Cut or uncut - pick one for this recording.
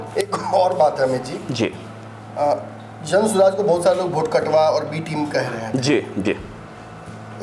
uncut